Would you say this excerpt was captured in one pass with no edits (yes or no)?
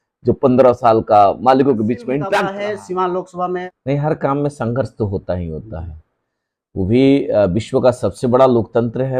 no